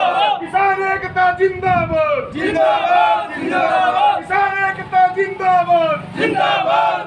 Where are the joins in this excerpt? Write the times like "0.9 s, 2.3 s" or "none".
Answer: none